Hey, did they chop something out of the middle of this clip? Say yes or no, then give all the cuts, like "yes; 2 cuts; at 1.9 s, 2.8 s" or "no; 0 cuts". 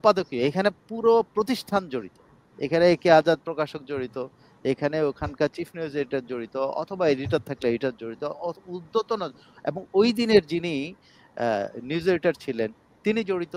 no; 0 cuts